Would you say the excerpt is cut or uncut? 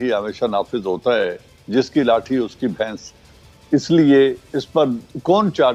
uncut